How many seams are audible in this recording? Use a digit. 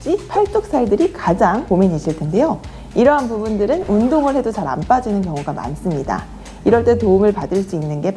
0